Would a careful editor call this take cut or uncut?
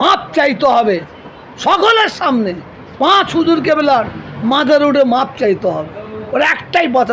uncut